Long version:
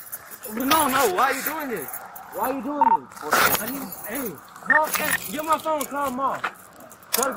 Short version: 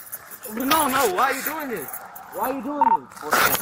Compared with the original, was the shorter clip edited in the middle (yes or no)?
no